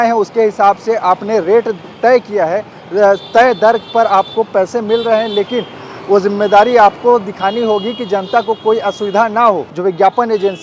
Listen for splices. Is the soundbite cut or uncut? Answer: cut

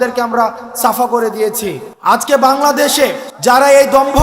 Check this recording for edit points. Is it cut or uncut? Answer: cut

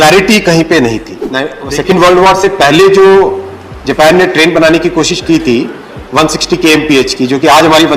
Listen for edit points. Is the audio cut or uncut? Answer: cut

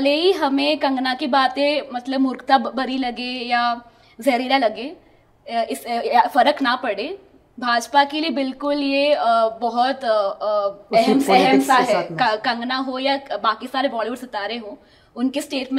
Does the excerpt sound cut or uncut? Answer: uncut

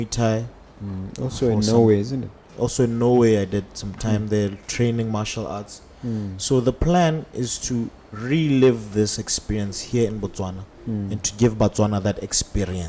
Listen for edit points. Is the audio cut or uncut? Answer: uncut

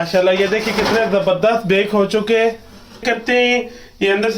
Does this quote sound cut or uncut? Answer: cut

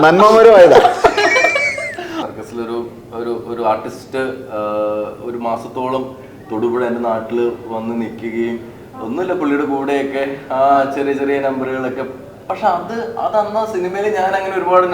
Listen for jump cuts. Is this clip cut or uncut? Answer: cut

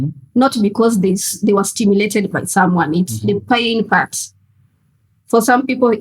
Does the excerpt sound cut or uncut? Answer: uncut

